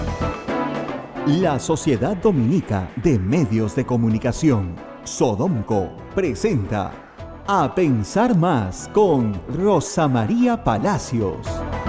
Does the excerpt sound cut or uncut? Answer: cut